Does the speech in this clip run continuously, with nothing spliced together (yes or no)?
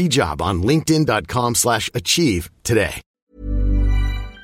no